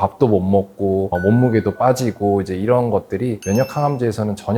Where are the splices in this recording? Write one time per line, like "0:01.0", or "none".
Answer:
none